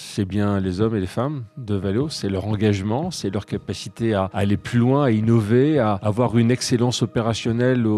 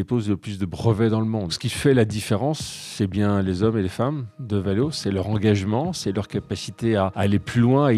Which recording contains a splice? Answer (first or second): second